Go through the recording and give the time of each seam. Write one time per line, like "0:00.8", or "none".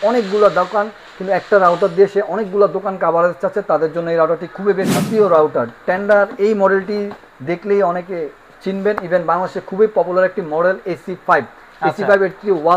0:05.1